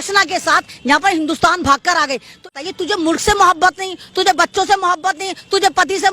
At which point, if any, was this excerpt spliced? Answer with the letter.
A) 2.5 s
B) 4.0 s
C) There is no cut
A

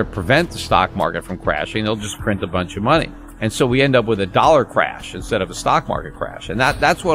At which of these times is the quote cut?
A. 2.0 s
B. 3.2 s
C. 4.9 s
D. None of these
B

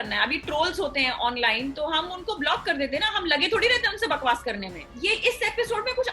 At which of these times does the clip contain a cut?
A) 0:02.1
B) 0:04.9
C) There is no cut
B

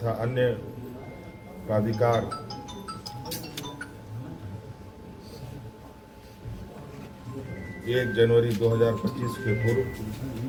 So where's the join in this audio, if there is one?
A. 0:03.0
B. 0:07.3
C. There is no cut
C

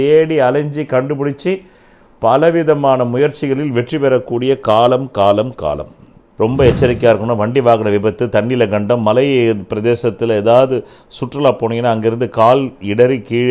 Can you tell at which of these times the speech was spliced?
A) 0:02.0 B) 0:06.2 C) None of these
B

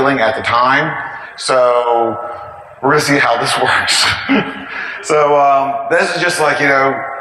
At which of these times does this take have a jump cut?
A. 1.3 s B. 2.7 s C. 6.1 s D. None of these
D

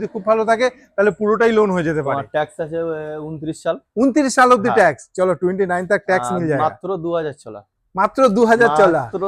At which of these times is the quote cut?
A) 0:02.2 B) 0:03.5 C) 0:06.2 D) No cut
A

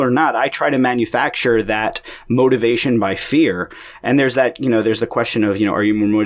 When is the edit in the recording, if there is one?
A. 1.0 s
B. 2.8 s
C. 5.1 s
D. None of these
D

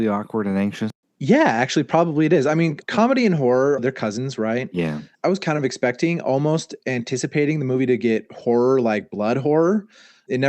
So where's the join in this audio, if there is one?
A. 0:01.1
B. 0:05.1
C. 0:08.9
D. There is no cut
A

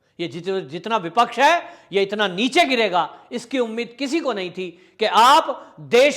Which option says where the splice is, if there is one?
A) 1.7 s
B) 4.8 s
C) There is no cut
C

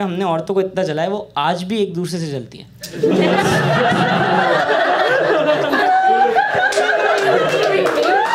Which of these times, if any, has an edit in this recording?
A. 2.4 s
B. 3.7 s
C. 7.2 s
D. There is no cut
D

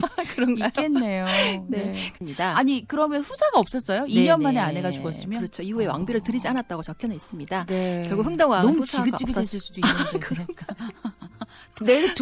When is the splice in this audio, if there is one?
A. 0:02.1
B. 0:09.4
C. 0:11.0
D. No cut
A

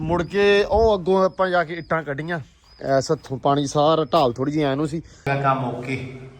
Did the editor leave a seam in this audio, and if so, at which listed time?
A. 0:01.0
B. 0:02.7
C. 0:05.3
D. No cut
C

